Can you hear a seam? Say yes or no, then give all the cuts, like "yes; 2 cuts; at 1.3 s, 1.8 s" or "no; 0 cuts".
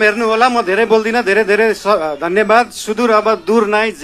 no; 0 cuts